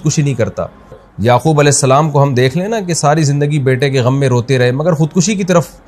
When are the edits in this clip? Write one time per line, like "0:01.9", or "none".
0:01.1